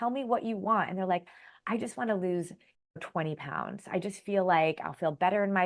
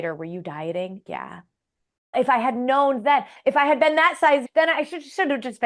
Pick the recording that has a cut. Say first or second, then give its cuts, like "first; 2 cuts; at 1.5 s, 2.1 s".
second; 3 cuts; at 1.0 s, 3.3 s, 4.4 s